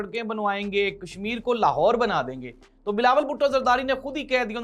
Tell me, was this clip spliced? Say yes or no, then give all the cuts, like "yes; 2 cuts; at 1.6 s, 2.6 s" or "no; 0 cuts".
no; 0 cuts